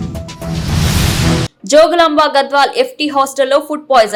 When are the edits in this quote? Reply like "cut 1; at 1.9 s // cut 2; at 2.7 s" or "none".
none